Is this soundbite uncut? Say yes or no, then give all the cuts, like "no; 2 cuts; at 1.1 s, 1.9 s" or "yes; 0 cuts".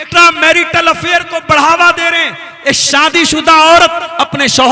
yes; 0 cuts